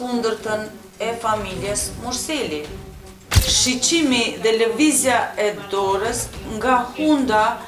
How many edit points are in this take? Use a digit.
1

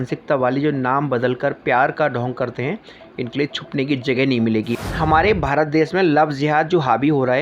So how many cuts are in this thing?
1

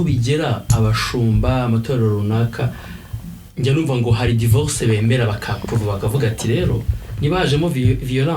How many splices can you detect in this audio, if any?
0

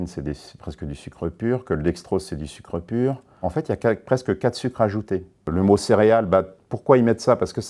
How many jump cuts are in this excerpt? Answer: 1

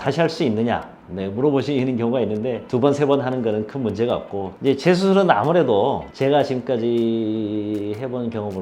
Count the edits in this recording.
2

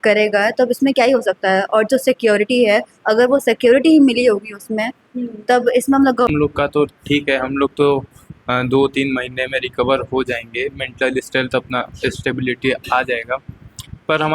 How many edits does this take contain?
1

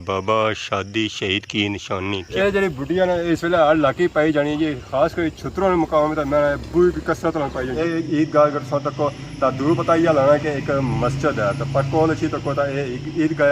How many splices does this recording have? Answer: 2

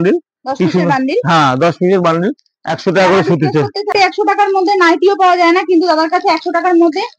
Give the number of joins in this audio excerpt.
1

